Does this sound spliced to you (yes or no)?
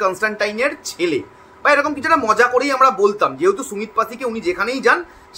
no